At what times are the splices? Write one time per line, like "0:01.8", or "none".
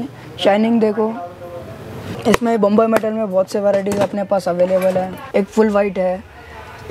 0:02.2
0:05.2